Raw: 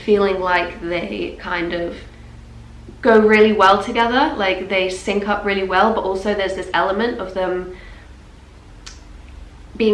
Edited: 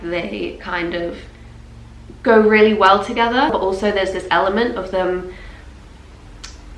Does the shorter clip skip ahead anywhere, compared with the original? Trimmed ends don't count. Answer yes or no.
yes